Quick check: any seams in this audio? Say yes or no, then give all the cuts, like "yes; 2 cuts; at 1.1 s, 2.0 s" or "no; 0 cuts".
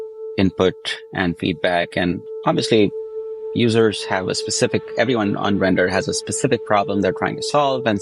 yes; 1 cut; at 2.3 s